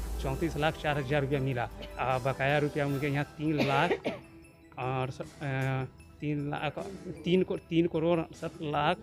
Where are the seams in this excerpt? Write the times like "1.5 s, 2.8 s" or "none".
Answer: none